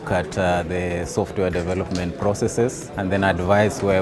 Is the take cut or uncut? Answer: cut